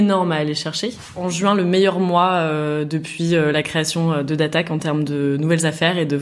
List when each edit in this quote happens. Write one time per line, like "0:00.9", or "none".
0:01.2